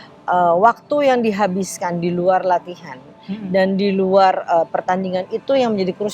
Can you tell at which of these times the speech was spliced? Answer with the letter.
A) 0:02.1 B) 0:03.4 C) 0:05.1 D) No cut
D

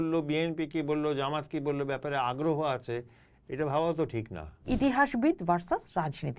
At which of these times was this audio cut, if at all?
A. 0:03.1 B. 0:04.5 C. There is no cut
B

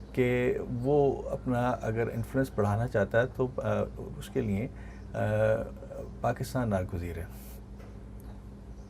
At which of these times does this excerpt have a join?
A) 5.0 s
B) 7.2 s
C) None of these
C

